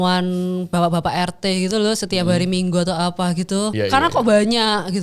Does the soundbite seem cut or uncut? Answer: cut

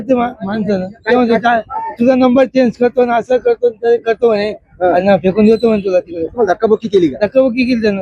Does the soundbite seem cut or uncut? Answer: uncut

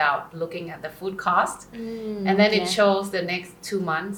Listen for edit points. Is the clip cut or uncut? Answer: uncut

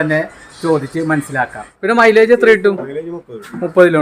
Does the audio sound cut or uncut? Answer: cut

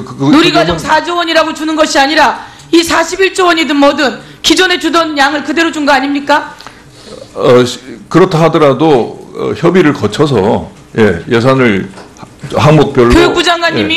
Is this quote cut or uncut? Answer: uncut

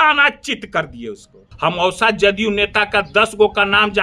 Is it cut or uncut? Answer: cut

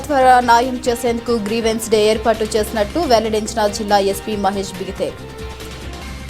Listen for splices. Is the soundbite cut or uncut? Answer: cut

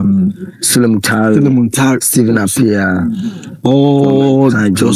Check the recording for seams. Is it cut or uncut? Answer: uncut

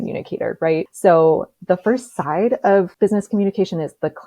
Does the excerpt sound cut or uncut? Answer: cut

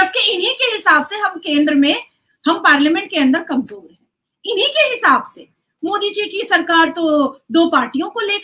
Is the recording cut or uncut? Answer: uncut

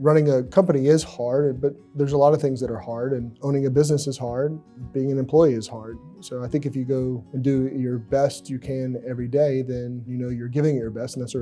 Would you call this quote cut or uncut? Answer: cut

